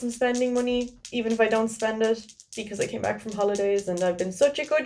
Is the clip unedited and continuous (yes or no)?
yes